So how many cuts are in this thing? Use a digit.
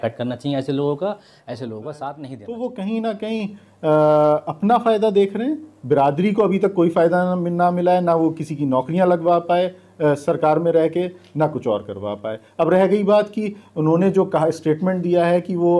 1